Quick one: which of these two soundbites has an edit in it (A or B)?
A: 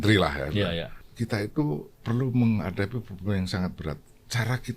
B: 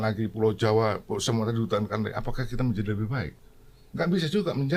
A